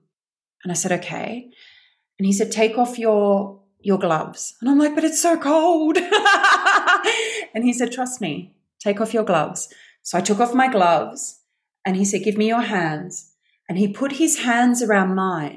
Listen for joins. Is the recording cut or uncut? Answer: uncut